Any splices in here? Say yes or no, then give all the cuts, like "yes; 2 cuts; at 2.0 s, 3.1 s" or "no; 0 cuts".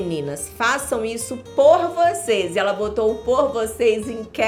no; 0 cuts